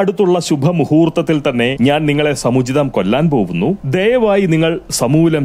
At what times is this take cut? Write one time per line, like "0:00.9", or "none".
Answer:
0:01.7